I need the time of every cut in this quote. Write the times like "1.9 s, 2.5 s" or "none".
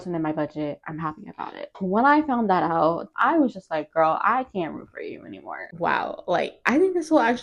1.6 s, 3.0 s, 5.6 s